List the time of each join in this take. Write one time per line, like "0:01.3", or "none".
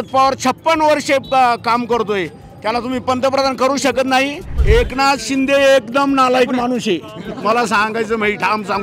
0:04.5